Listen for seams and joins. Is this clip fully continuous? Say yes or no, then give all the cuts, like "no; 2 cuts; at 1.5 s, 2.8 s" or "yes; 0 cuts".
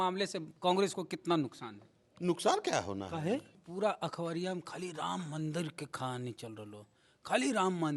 no; 1 cut; at 3.6 s